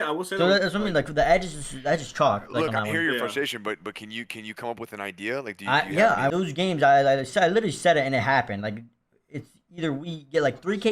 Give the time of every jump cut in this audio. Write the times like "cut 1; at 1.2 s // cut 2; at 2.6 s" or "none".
cut 1; at 6.3 s